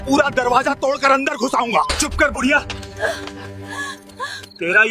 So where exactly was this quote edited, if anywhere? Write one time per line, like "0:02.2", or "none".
0:02.0